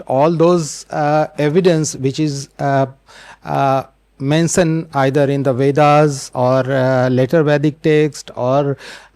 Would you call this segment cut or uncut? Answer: uncut